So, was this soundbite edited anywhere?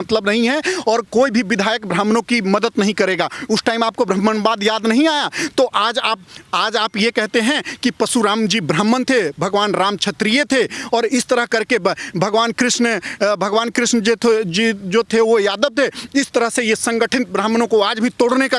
no; 0 cuts

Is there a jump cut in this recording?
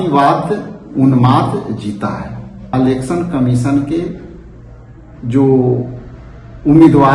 yes; 1 cut; at 2.7 s

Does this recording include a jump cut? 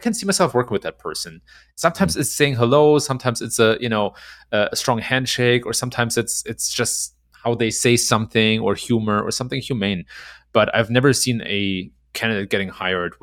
no; 0 cuts

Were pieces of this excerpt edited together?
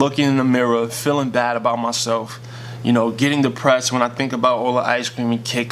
no; 0 cuts

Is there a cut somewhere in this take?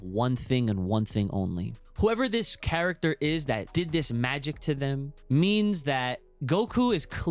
yes; 4 cuts; at 1.8 s, 3.7 s, 5.1 s, 6.3 s

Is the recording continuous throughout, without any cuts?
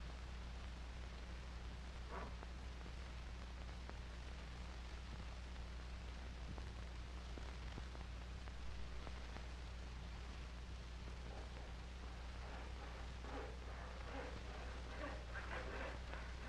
yes; 0 cuts

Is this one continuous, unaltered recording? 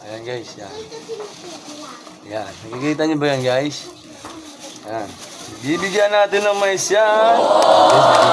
no; 1 cut; at 7.4 s

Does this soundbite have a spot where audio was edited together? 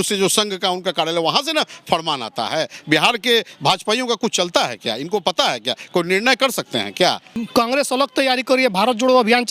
yes; 1 cut; at 7.3 s

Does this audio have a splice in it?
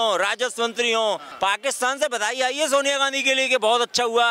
yes; 1 cut; at 1.3 s

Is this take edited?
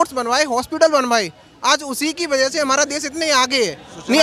no; 0 cuts

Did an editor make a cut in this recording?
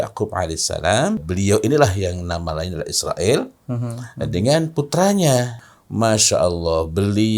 yes; 2 cuts; at 1.3 s, 5.7 s

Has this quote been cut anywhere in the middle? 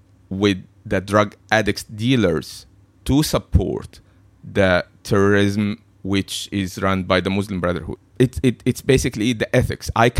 yes; 1 cut; at 8.0 s

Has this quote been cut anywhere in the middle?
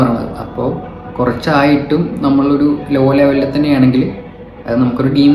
no; 0 cuts

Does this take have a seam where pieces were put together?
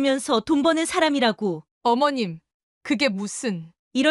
yes; 1 cut; at 1.7 s

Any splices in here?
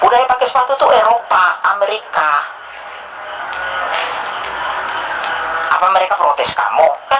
no; 0 cuts

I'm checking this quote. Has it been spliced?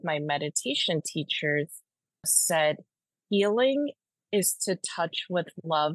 yes; 1 cut; at 2.4 s

